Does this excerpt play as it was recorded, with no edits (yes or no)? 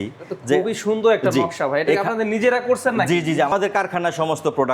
no